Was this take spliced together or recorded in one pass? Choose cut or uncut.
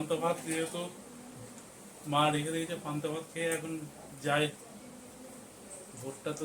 uncut